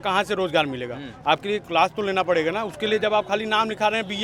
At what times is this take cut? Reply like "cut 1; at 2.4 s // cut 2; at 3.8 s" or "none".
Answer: none